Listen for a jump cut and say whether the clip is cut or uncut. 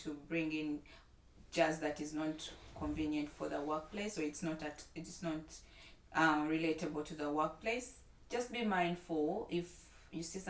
uncut